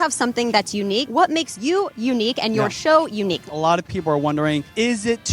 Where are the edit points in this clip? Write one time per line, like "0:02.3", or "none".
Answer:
0:01.1
0:03.4